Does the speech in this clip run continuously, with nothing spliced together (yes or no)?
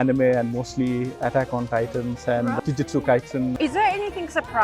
no